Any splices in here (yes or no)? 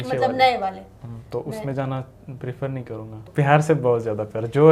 yes